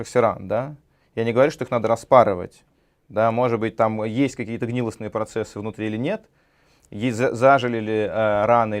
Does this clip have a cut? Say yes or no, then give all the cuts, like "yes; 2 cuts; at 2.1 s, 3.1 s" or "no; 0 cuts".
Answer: no; 0 cuts